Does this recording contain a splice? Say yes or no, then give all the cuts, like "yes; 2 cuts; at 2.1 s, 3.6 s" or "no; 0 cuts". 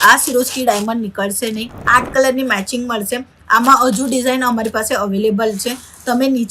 yes; 1 cut; at 1.7 s